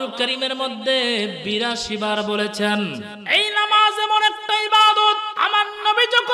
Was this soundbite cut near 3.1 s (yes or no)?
yes